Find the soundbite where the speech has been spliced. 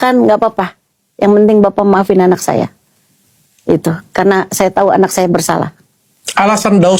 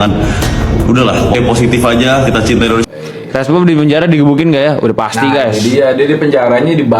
second; 1 cut; at 2.9 s

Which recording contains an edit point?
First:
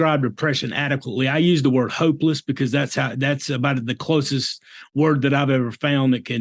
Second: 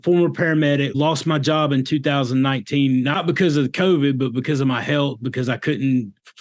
second; 2 cuts; at 0.9 s, 3.2 s

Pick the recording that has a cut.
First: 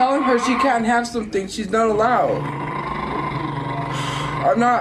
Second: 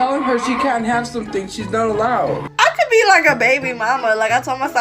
second; 1 cut; at 2.5 s

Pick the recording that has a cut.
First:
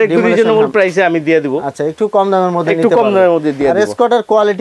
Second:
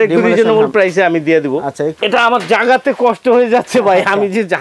second; 1 cut; at 1.9 s

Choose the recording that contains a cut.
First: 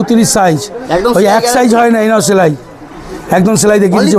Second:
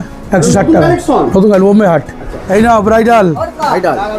second; 1 cut; at 2.3 s

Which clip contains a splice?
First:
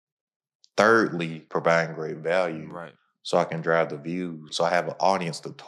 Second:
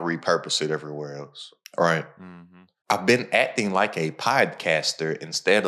first; 2 cuts; at 1.4 s, 4.4 s

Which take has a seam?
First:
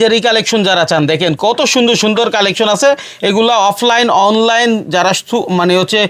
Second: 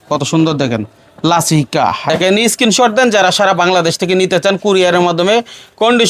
second; 1 cut; at 2.0 s

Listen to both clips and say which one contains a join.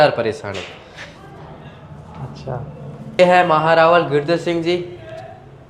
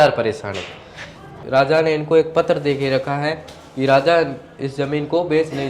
second; 1 cut; at 1.3 s

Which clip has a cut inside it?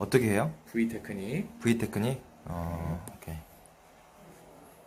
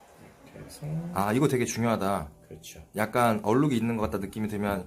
second; 1 cut; at 1.1 s

